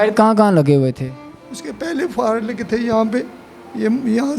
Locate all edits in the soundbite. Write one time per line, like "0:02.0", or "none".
none